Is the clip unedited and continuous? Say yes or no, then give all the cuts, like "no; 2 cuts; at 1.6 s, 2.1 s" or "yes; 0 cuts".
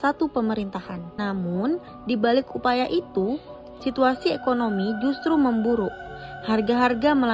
no; 1 cut; at 1.0 s